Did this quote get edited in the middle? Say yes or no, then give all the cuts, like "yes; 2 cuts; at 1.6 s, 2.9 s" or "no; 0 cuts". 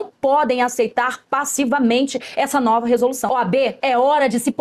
yes; 1 cut; at 3.2 s